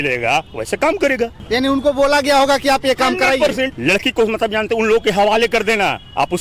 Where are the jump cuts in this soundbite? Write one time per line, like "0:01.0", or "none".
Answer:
0:01.4
0:03.7